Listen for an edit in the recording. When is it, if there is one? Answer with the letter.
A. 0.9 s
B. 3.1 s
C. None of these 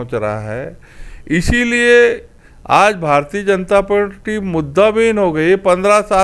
C